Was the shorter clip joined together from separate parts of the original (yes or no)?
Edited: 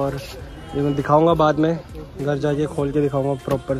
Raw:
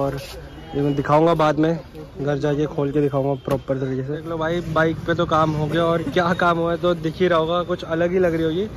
no